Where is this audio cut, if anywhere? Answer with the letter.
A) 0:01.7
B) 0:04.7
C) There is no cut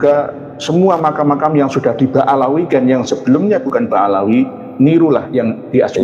C